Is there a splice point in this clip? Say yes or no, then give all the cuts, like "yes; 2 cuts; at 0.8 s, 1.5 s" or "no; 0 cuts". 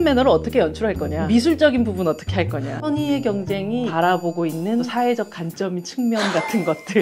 yes; 4 cuts; at 1.1 s, 2.7 s, 3.9 s, 4.9 s